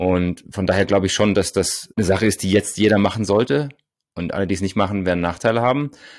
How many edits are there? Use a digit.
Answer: 0